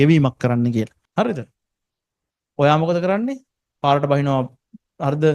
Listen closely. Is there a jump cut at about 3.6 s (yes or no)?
no